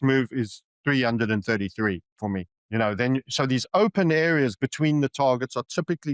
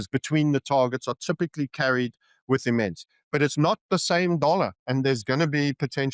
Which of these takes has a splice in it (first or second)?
first